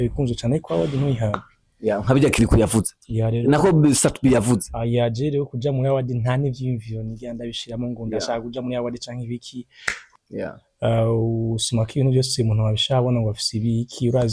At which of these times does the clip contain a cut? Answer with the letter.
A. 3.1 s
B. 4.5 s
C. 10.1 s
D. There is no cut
C